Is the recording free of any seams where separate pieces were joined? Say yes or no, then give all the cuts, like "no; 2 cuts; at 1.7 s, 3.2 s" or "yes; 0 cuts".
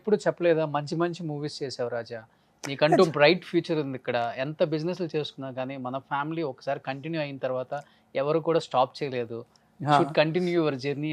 yes; 0 cuts